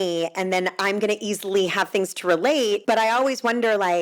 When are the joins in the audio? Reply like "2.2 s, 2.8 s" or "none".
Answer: 2.8 s